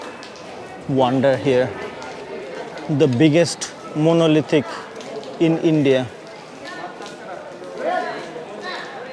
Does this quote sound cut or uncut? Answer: uncut